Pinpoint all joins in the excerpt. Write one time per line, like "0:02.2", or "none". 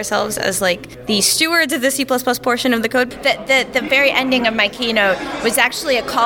0:00.9
0:03.1